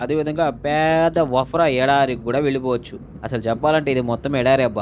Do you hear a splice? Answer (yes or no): yes